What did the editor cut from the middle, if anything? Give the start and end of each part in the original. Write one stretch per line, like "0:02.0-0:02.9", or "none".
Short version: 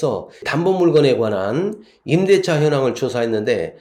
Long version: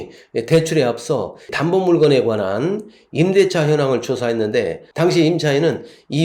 none